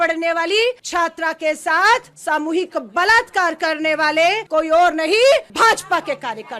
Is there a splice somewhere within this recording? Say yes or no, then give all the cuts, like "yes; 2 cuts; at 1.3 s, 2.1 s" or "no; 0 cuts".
yes; 4 cuts; at 0.8 s, 2.1 s, 4.4 s, 5.5 s